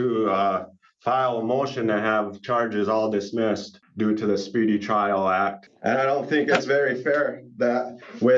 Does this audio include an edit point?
yes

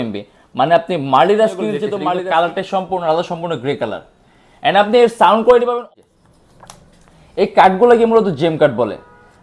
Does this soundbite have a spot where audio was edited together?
yes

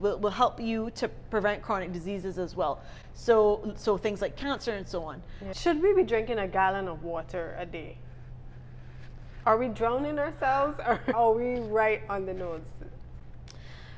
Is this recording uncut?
no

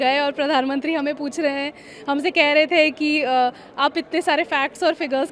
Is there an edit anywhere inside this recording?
no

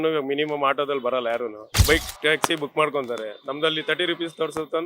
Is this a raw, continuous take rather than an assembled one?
no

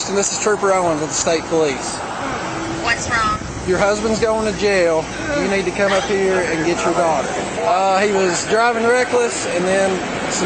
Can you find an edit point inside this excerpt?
yes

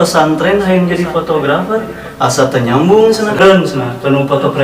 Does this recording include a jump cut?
yes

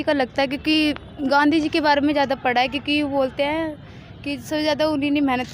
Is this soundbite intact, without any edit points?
yes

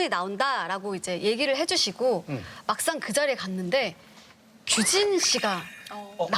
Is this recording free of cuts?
yes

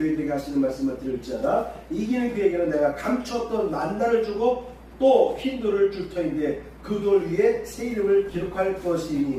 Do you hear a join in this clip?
no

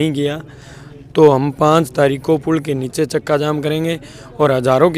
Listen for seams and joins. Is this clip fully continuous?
yes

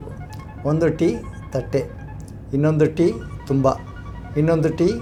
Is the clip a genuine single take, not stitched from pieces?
yes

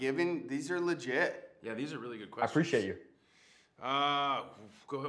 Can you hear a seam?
no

